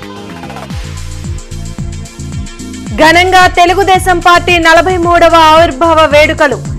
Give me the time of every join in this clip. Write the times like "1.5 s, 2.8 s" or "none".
1.8 s